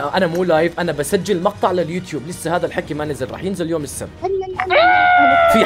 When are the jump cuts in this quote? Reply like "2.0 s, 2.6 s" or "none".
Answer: none